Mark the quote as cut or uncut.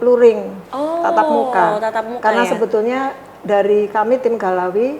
uncut